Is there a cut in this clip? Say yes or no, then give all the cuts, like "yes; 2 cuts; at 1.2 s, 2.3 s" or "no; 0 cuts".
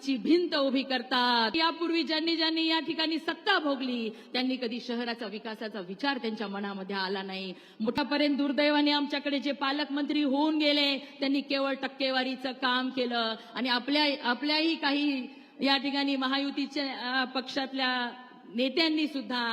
yes; 2 cuts; at 1.6 s, 8.0 s